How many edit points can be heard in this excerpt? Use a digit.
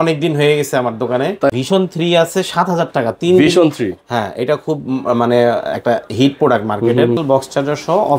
2